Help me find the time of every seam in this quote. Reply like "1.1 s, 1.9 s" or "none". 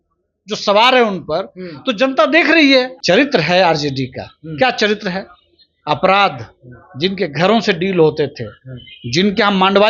3.0 s